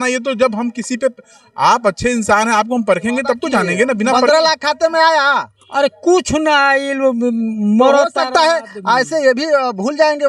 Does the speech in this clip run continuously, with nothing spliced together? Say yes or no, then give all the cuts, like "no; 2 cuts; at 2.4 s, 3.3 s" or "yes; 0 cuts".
no; 1 cut; at 4.2 s